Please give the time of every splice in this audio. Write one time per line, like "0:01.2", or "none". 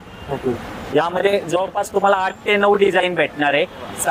none